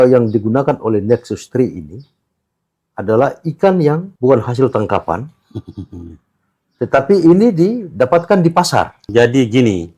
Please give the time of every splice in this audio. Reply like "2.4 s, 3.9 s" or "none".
4.1 s, 9.0 s